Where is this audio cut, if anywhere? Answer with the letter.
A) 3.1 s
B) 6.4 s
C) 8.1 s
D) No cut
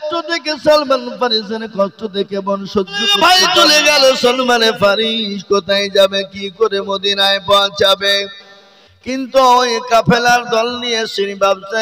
A